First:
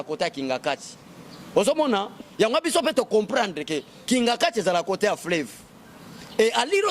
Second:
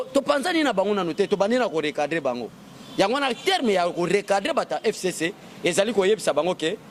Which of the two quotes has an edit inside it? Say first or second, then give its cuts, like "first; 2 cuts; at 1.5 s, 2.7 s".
first; 1 cut; at 2.1 s